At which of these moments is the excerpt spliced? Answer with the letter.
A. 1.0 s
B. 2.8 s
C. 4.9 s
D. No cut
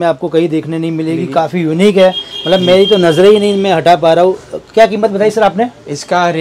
D